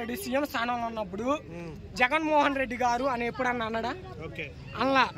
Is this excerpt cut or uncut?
uncut